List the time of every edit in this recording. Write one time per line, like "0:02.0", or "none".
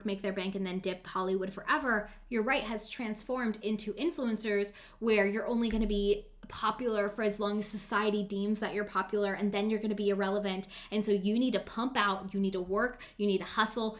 none